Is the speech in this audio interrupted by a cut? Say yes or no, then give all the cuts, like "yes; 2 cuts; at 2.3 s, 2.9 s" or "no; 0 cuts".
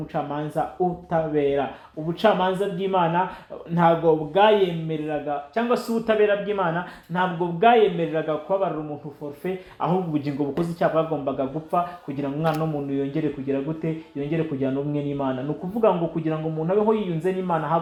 no; 0 cuts